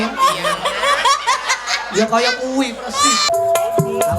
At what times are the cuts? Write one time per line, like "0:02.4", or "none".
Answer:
0:03.3